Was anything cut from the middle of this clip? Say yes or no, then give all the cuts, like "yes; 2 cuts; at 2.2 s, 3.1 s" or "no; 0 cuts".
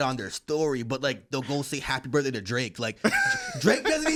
no; 0 cuts